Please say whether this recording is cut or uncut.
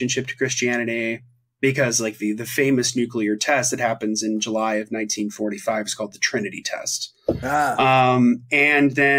uncut